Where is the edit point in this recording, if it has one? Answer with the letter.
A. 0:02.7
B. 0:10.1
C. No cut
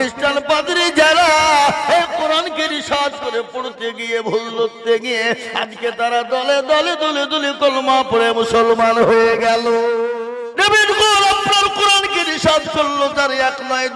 B